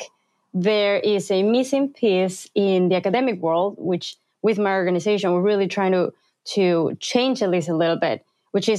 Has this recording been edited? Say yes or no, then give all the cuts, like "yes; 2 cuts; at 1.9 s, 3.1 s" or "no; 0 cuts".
no; 0 cuts